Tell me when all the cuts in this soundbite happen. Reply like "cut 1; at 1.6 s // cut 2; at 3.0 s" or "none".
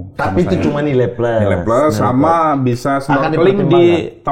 none